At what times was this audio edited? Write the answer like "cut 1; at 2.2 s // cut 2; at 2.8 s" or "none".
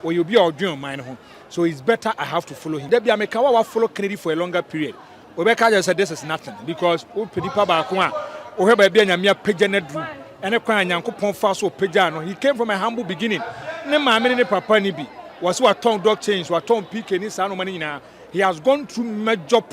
cut 1; at 2.8 s